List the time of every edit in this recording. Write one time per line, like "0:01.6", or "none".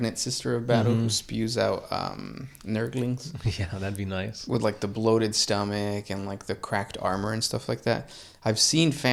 none